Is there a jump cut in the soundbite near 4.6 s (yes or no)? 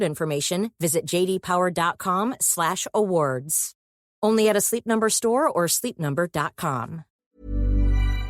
no